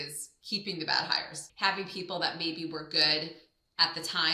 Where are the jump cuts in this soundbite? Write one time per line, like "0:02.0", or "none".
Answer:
0:01.4